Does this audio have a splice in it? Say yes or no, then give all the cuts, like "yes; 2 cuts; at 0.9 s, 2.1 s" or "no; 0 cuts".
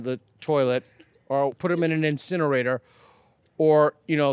yes; 1 cut; at 1.6 s